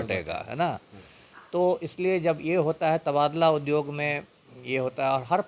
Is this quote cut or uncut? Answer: uncut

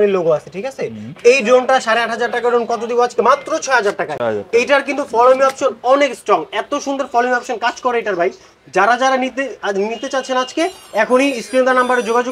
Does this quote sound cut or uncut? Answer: uncut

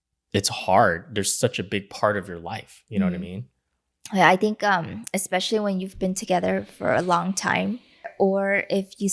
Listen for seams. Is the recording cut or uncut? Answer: cut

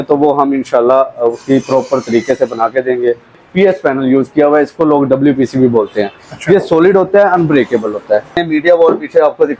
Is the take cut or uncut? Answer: cut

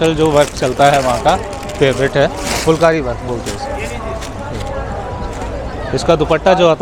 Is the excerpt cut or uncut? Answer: uncut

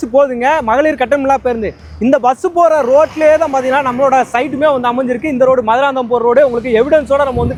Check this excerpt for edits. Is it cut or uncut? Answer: uncut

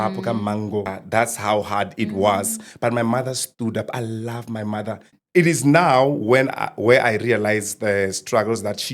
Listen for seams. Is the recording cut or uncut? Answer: cut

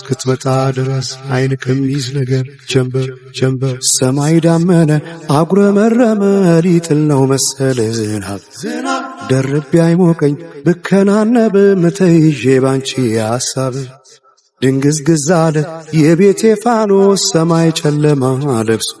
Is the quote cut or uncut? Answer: cut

